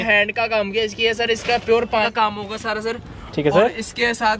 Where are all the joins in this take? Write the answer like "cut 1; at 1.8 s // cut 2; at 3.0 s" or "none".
cut 1; at 2.1 s